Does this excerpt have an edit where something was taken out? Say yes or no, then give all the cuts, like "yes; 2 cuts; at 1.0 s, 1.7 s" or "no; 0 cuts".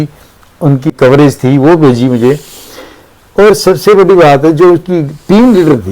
yes; 1 cut; at 0.9 s